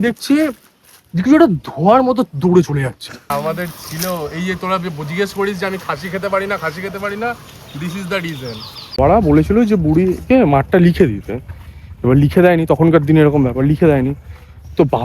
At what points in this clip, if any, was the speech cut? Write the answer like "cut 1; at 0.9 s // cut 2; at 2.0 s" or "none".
cut 1; at 3.3 s // cut 2; at 9.0 s